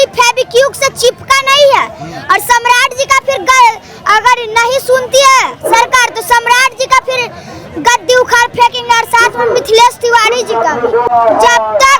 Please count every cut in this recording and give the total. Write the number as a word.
one